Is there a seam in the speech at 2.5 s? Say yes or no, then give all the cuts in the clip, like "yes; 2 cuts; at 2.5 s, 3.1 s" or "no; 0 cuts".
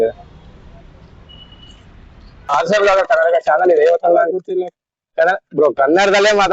yes; 1 cut; at 2.5 s